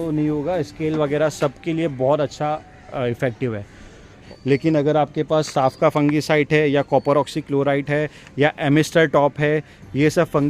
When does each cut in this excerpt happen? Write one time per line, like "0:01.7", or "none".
0:04.1